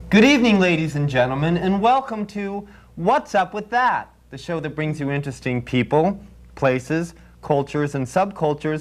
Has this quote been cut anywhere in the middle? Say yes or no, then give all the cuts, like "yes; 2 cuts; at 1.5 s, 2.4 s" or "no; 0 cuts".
yes; 1 cut; at 5.6 s